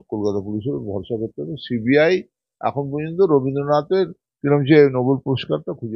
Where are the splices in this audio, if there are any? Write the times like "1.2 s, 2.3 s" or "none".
none